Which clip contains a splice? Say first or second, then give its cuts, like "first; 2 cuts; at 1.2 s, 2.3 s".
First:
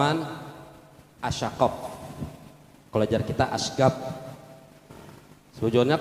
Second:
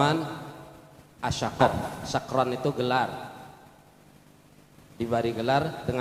second; 1 cut; at 1.9 s